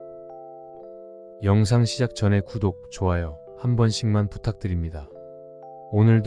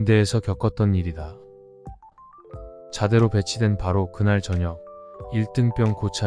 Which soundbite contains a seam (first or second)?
first